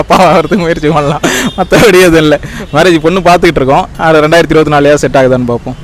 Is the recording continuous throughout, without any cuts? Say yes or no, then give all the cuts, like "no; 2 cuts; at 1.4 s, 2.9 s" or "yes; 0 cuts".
yes; 0 cuts